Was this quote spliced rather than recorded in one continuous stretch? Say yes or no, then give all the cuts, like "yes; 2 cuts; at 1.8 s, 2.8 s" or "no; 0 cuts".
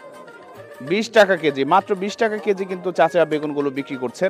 no; 0 cuts